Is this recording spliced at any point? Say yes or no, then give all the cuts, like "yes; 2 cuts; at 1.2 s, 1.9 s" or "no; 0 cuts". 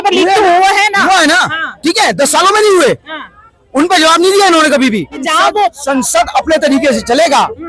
yes; 1 cut; at 5.3 s